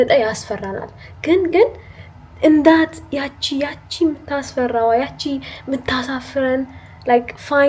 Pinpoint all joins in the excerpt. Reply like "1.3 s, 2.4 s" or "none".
none